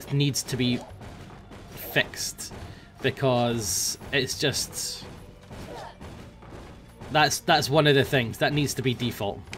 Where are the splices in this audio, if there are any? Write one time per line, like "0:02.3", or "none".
none